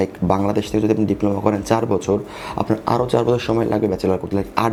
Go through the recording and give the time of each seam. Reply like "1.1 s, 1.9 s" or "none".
none

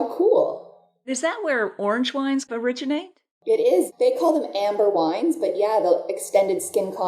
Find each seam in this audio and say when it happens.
1.1 s, 2.5 s, 3.9 s

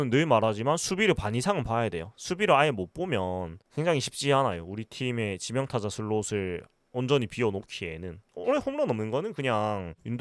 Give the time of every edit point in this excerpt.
8.3 s

